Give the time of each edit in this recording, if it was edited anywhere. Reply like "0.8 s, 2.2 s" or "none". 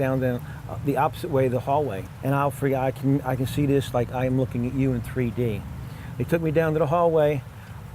2.1 s